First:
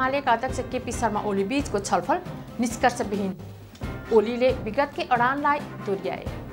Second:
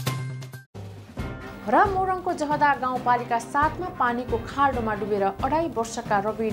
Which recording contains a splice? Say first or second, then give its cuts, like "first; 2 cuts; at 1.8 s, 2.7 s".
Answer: second; 1 cut; at 1.2 s